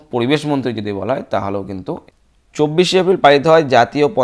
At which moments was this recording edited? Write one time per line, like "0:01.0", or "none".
0:02.1